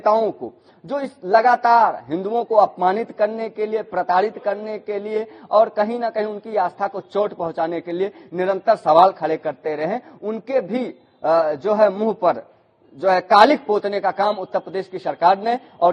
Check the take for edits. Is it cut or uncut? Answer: uncut